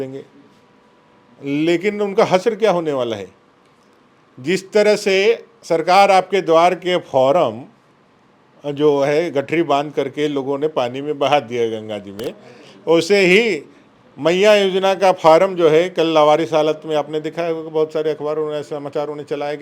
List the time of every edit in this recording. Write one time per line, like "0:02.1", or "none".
none

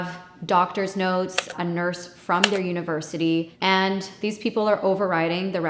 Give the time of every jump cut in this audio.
0:01.5

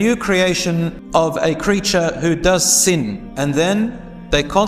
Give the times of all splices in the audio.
0:01.0
0:03.2

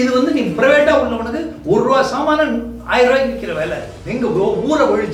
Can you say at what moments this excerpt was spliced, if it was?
0:04.0

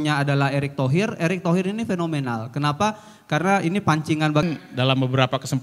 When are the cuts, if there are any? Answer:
0:04.4

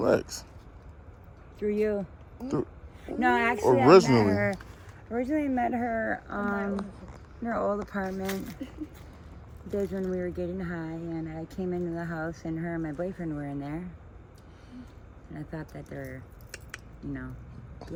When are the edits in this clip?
none

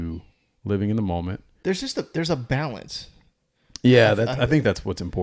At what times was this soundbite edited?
0:01.5

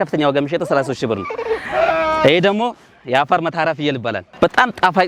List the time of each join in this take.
0:01.7
0:04.3

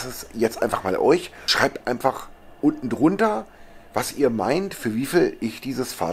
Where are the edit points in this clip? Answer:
0:01.4

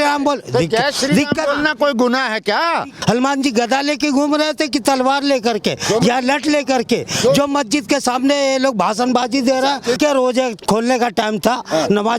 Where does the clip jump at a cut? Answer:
0:02.9
0:10.0

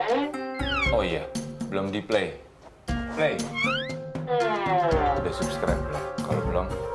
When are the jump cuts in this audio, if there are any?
0:03.7

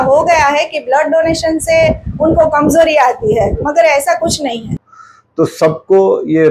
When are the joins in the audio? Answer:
0:04.8

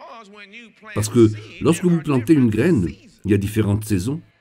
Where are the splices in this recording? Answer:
0:00.9

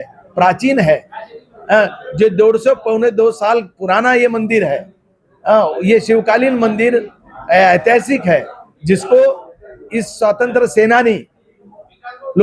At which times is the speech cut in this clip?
none

